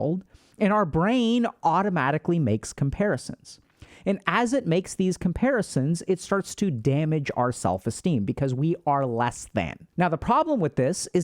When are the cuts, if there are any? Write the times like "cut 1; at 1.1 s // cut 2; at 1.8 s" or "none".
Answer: none